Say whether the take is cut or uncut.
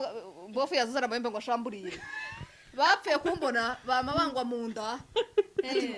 uncut